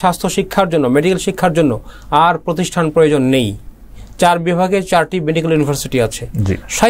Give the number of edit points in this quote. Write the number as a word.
zero